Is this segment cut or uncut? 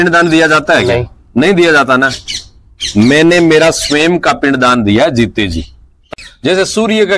cut